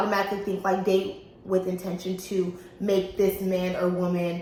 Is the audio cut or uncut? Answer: uncut